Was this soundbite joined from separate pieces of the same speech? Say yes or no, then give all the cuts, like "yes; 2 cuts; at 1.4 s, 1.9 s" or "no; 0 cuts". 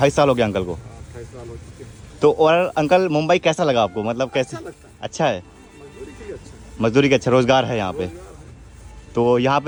no; 0 cuts